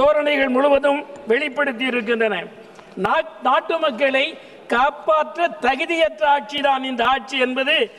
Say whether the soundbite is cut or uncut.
uncut